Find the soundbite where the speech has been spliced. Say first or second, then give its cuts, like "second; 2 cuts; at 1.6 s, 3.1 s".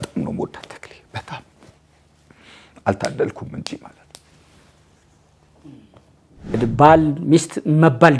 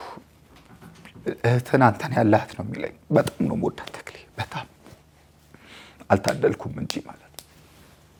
first; 1 cut; at 6.6 s